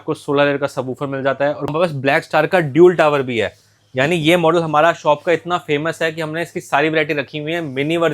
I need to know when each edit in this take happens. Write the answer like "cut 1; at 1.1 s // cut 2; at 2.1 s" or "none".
cut 1; at 1.6 s